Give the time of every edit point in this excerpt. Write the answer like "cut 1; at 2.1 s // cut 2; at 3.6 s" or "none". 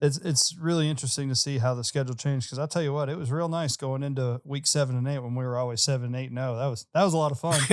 none